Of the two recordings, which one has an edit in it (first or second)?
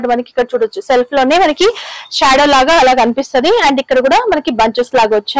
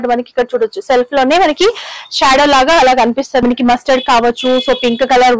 second